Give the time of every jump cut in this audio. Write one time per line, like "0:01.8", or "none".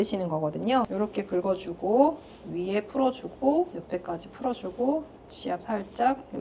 0:00.9
0:03.8